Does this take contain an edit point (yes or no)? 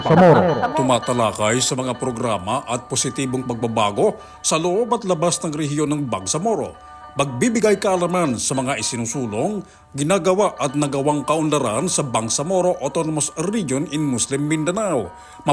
no